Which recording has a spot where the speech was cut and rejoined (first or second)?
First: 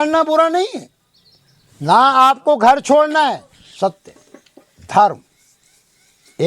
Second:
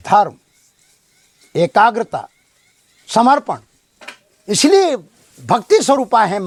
first